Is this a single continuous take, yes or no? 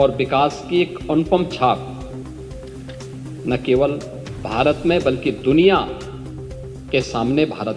no